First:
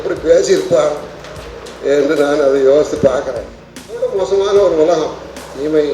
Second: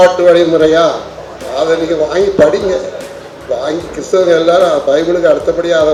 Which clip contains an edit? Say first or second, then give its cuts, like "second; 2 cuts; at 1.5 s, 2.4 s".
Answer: first; 1 cut; at 4.0 s